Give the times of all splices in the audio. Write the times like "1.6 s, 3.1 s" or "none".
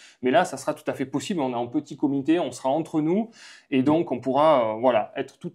none